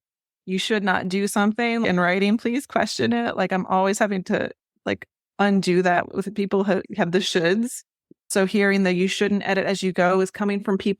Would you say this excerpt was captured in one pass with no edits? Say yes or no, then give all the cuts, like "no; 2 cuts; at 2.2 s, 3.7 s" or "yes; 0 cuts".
no; 2 cuts; at 1.8 s, 6.9 s